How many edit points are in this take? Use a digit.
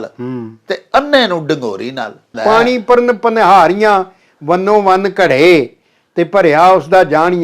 1